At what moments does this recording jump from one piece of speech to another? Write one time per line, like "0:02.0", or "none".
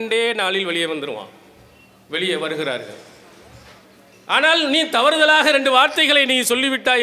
none